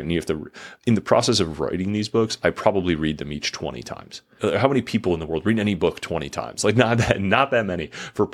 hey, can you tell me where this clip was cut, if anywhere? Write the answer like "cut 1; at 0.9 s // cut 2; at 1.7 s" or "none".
cut 1; at 4.3 s